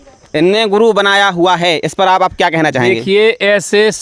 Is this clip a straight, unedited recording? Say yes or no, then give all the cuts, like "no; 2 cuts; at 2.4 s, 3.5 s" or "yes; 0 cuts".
yes; 0 cuts